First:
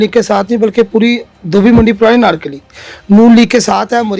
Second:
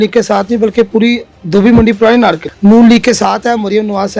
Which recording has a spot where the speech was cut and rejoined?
second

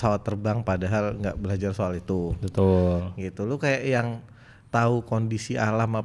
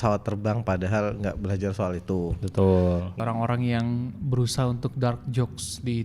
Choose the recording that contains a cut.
second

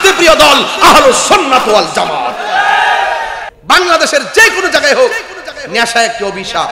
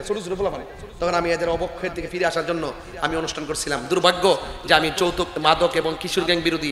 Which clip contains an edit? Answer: first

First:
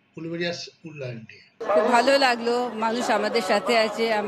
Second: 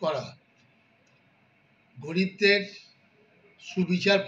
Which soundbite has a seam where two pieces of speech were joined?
first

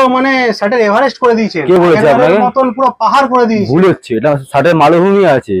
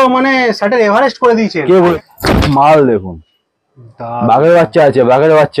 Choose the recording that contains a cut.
second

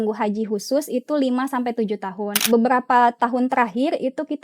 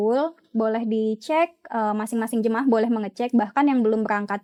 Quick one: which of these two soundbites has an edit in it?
first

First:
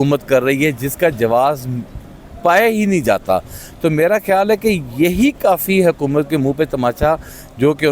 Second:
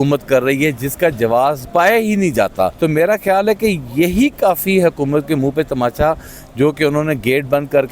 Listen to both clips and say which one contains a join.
second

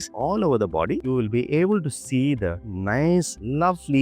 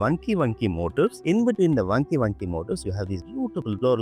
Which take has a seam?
first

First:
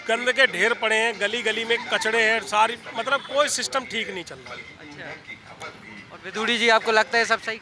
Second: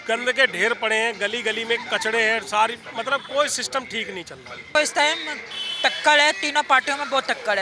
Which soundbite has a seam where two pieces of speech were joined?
second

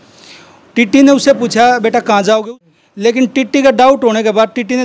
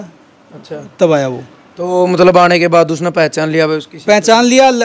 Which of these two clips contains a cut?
first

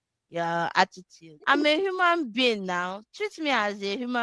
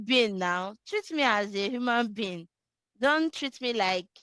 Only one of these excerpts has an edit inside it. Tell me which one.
first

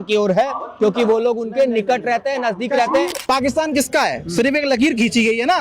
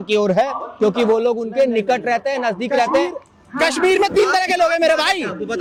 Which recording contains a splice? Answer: first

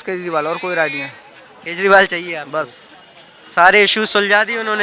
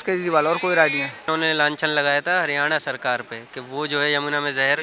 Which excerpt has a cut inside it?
second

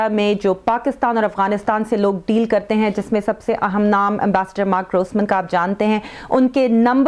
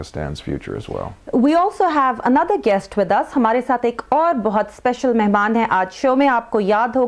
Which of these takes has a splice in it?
second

